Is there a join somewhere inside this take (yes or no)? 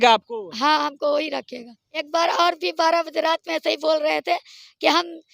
yes